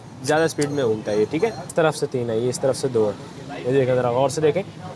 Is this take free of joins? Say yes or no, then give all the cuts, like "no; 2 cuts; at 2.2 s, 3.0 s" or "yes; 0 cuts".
no; 1 cut; at 1.7 s